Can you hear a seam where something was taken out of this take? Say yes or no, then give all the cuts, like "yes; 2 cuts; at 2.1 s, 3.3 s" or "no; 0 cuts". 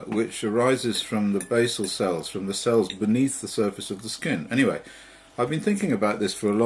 yes; 1 cut; at 3.1 s